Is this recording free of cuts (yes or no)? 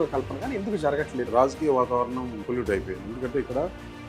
no